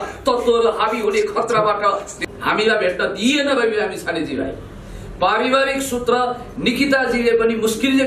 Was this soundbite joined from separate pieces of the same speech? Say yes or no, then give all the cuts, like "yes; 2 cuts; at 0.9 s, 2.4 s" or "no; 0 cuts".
yes; 1 cut; at 2.2 s